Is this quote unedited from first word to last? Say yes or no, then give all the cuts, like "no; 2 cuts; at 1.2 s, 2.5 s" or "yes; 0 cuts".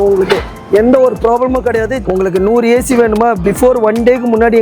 no; 1 cut; at 1.9 s